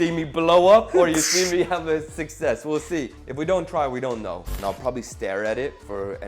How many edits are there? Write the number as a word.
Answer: one